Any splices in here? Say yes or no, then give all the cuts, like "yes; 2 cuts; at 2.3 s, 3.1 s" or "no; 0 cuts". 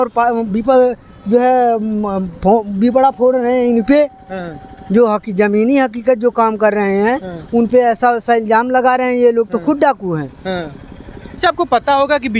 yes; 1 cut; at 11.4 s